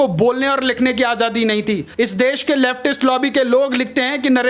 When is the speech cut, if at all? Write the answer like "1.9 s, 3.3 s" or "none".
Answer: 1.9 s